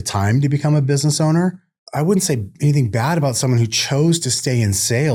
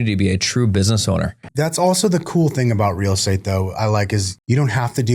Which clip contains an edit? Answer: second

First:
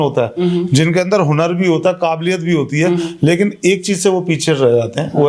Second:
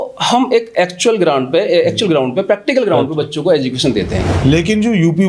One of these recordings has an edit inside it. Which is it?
second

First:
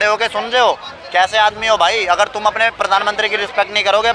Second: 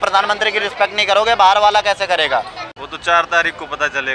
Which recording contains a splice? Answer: second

